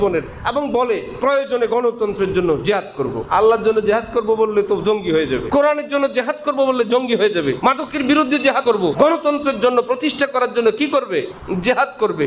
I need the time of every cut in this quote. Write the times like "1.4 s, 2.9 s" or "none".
3.2 s, 5.4 s, 7.6 s, 8.7 s, 11.4 s